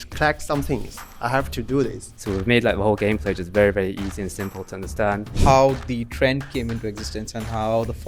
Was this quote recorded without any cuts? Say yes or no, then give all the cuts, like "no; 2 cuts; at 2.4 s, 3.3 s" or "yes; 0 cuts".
no; 2 cuts; at 2.1 s, 5.3 s